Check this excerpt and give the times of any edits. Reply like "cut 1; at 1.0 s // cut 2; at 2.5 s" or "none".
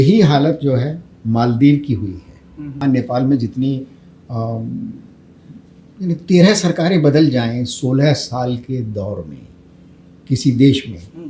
cut 1; at 2.8 s